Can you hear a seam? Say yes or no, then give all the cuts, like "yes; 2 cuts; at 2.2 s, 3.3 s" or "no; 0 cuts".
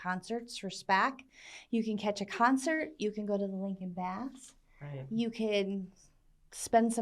no; 0 cuts